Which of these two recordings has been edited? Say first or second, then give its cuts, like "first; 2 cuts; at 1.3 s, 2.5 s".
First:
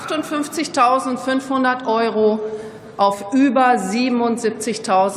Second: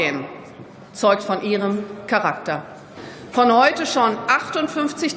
second; 1 cut; at 2.9 s